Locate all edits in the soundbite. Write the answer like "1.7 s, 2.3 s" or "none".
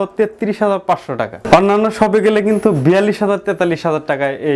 none